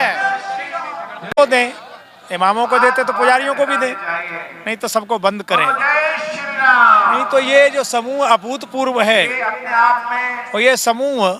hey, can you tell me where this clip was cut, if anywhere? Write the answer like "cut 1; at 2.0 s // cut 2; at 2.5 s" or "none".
none